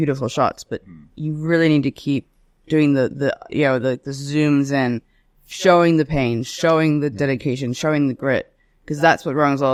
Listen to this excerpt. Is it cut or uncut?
uncut